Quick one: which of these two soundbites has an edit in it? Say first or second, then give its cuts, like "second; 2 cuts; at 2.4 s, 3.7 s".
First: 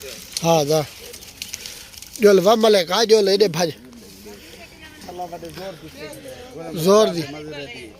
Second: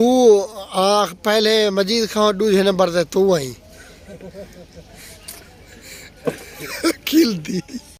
first; 1 cut; at 5.0 s